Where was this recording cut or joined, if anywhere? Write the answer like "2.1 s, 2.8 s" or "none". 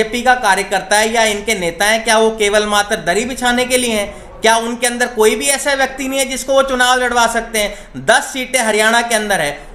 none